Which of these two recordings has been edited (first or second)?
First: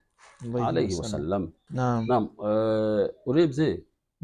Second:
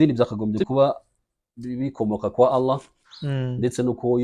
first